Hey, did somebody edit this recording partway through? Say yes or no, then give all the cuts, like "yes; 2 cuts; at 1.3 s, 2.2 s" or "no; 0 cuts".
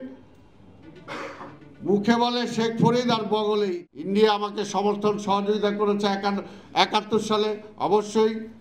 yes; 1 cut; at 3.9 s